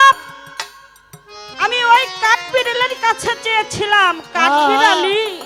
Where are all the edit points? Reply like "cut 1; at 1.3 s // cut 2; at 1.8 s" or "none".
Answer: none